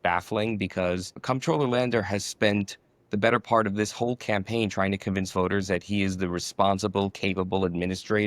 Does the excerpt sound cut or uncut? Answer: cut